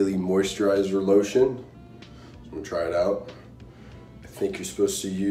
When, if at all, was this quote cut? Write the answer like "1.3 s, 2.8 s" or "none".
none